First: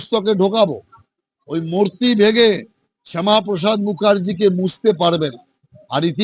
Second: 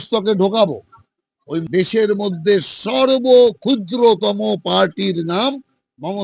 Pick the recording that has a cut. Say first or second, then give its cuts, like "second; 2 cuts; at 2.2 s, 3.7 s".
second; 1 cut; at 1.6 s